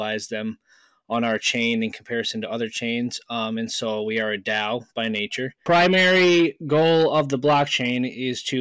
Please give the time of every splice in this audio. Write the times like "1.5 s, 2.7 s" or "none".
5.6 s